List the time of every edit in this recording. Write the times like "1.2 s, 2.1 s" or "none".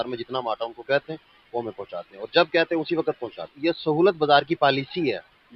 3.4 s